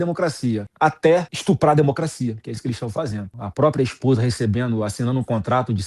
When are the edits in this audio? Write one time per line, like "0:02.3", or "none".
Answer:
0:01.1
0:03.3